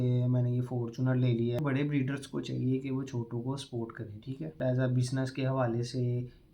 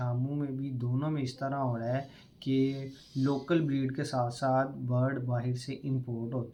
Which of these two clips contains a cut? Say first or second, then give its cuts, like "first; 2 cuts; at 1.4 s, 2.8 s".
first; 2 cuts; at 1.6 s, 4.6 s